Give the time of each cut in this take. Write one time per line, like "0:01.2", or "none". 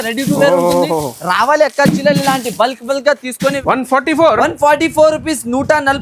0:03.6